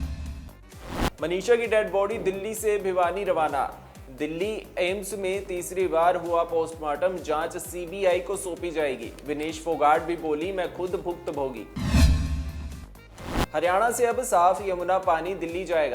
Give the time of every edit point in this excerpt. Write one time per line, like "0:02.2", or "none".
0:01.1